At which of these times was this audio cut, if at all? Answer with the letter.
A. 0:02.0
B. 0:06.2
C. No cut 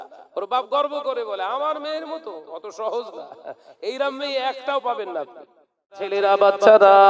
B